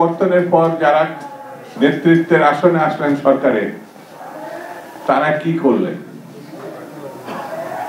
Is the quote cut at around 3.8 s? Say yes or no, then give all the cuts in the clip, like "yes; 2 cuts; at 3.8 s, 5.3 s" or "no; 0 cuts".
no; 0 cuts